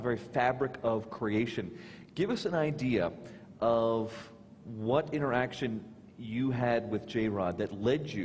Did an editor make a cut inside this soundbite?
yes; 1 cut; at 1.0 s

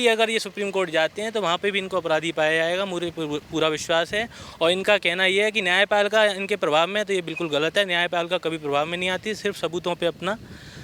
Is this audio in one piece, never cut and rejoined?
yes; 0 cuts

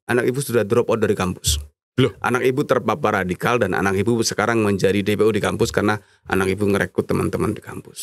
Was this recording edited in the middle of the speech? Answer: no; 0 cuts

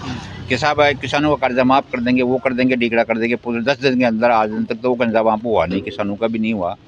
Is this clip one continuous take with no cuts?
yes; 0 cuts

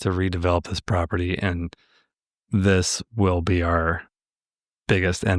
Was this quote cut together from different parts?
no; 0 cuts

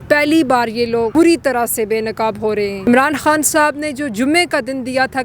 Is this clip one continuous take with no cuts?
no; 2 cuts; at 1.1 s, 2.9 s

